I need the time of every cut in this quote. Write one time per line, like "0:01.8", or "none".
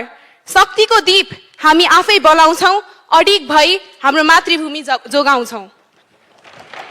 none